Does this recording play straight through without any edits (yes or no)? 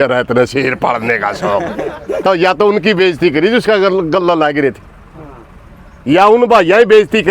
no